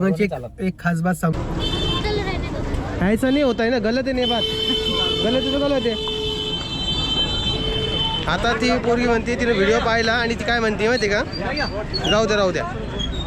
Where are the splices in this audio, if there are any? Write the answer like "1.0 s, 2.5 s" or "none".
1.3 s